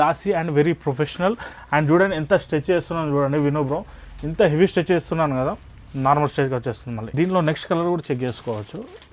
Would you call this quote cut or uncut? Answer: uncut